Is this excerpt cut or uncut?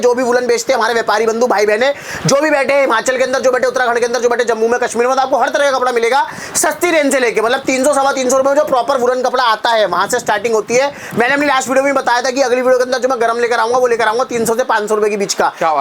uncut